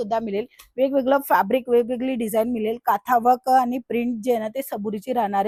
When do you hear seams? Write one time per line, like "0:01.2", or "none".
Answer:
none